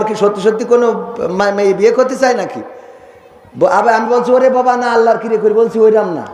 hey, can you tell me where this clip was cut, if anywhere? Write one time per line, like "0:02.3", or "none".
none

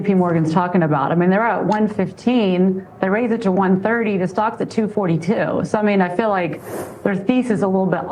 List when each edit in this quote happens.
none

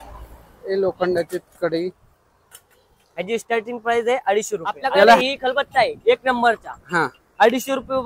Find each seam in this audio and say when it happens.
0:05.2

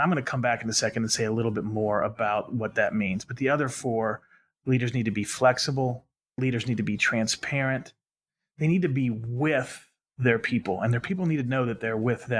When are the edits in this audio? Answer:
0:06.4

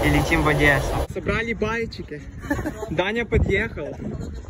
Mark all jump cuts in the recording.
0:01.1

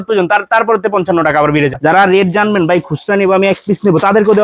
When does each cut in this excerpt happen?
0:02.0

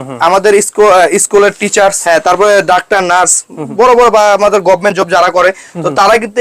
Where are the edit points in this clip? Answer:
0:02.0

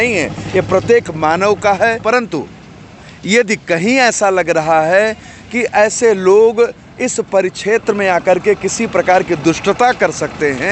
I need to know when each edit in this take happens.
0:02.0

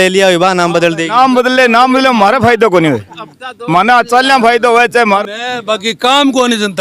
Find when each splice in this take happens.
0:05.2

